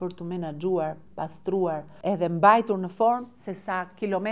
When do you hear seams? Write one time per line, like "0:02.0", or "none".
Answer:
0:01.9